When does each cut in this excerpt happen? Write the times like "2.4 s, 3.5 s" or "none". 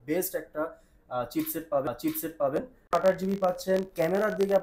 none